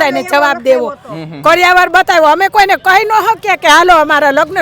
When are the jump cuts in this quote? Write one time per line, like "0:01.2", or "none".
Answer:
none